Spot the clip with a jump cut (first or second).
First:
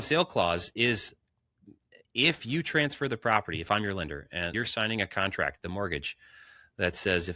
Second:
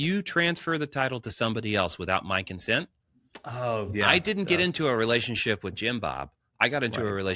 first